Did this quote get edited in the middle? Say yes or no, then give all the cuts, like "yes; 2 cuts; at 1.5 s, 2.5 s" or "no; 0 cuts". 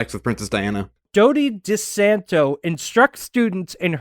yes; 1 cut; at 1.1 s